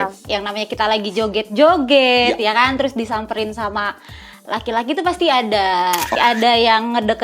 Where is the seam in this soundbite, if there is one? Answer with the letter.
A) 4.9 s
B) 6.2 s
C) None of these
B